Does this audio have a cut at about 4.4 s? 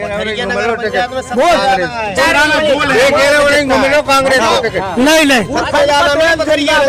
no; 1 cut; at 2.2 s

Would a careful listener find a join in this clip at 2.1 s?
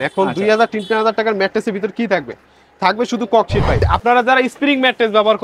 no; 1 cut; at 3.8 s

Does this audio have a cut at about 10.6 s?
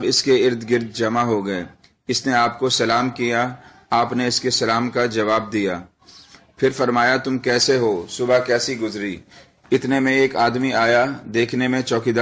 yes; 1 cut; at 10.6 s

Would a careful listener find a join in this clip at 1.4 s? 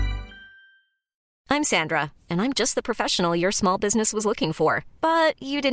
yes; 1 cut; at 1.4 s

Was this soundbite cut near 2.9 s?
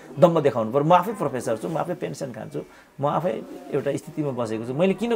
no; 0 cuts

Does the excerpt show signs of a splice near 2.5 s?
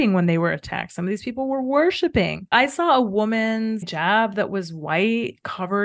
yes; 1 cut; at 2.5 s

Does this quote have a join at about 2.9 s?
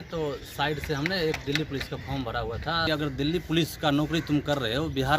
yes; 1 cut; at 2.9 s

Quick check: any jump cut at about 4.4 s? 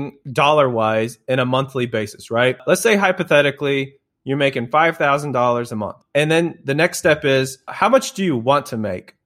no; 3 cuts; at 2.6 s, 6.0 s, 7.7 s

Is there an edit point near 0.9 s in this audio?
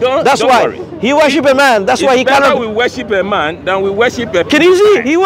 no; 0 cuts

